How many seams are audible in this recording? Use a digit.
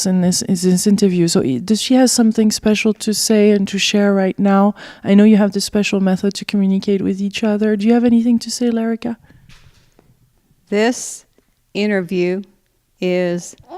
1